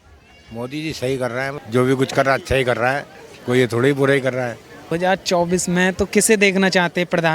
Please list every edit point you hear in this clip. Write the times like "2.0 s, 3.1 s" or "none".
1.6 s, 4.9 s